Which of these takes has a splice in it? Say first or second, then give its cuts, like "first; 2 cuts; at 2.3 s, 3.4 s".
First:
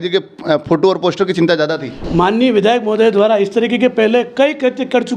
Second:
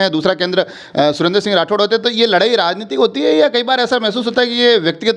first; 1 cut; at 2.0 s